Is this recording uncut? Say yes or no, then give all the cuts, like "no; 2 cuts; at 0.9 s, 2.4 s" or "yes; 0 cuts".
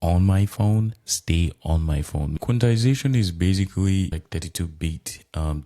no; 2 cuts; at 2.4 s, 4.2 s